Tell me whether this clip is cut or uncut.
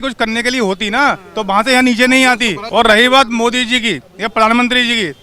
cut